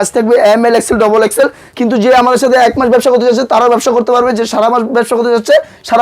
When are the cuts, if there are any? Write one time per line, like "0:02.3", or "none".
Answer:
0:01.6